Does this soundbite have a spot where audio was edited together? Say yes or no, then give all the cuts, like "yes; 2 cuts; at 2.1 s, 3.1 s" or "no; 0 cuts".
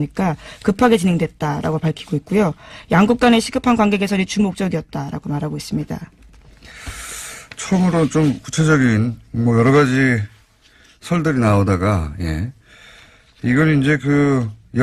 no; 0 cuts